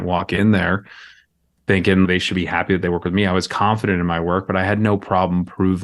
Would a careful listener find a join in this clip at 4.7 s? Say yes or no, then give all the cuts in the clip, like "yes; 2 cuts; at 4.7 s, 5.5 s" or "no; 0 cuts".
no; 1 cut; at 2.1 s